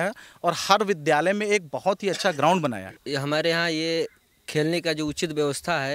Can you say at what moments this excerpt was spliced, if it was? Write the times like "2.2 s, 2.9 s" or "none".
3.0 s